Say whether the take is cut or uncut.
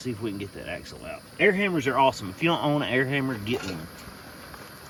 uncut